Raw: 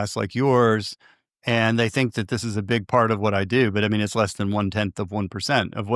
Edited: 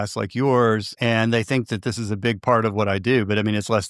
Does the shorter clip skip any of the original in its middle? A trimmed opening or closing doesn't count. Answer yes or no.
yes